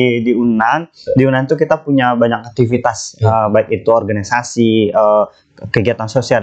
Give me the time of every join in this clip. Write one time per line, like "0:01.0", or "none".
none